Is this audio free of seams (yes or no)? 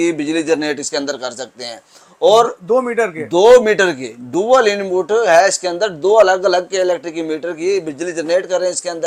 yes